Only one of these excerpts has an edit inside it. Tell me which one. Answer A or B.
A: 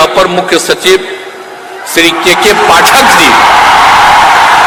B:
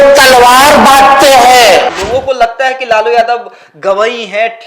B